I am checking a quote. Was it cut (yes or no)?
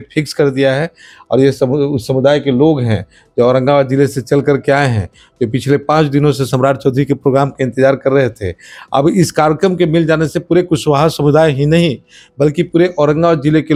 no